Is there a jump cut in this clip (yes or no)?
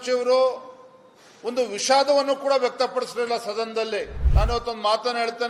yes